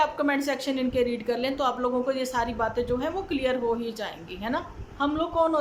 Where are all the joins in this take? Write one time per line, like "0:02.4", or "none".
none